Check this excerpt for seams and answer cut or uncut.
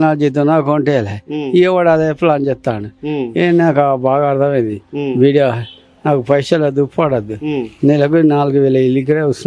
uncut